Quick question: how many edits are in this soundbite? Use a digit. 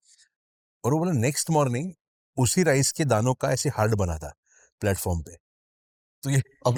0